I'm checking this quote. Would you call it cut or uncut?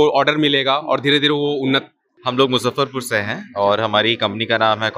cut